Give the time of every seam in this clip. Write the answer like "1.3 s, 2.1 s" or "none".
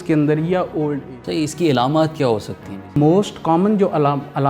1.0 s, 3.0 s